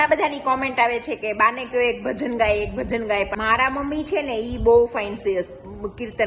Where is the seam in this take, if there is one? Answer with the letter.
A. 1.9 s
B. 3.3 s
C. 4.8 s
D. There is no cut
B